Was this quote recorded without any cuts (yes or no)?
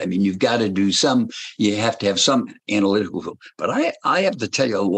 yes